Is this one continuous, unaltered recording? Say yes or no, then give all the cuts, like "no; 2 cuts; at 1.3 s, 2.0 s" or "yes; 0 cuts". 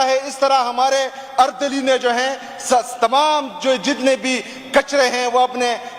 yes; 0 cuts